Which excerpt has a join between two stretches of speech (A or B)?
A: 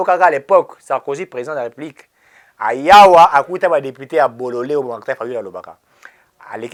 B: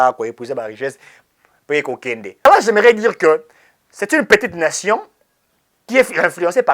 B